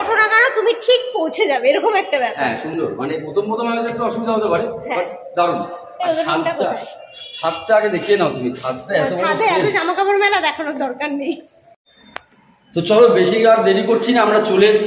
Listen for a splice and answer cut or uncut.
uncut